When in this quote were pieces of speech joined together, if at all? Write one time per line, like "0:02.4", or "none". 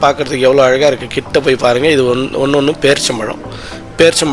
none